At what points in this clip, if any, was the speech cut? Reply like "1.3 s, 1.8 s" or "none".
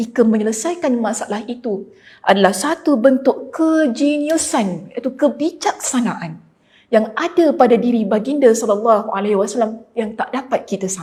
none